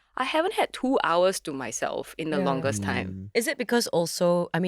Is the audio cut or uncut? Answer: uncut